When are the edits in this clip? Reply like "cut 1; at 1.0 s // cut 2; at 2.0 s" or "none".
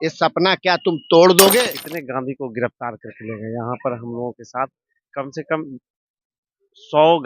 cut 1; at 1.6 s